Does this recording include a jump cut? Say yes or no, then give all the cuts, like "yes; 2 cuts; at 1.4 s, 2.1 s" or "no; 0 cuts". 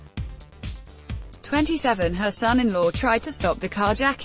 no; 0 cuts